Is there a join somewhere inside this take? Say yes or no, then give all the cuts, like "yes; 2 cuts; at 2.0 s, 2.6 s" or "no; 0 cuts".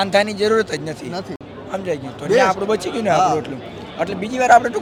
no; 0 cuts